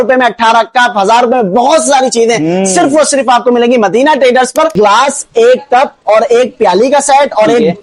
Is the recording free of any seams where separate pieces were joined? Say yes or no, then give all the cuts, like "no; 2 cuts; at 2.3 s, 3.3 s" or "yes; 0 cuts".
no; 1 cut; at 4.7 s